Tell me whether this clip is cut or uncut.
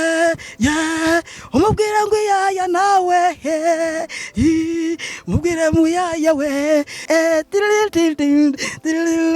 cut